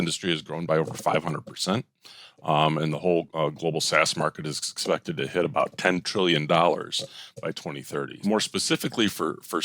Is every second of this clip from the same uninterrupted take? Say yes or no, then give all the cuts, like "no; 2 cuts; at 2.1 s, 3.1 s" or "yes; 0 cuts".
no; 1 cut; at 8.2 s